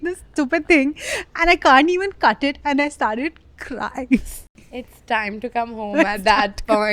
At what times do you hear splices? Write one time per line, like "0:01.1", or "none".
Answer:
0:04.5